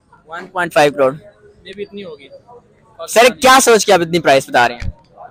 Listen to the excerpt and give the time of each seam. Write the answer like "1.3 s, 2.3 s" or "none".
none